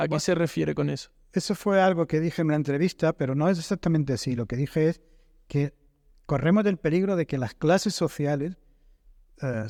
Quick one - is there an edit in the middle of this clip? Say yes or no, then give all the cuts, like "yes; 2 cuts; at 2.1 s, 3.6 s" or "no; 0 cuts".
no; 0 cuts